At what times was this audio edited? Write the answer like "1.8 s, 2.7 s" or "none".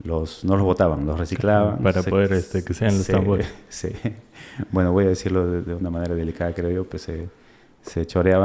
none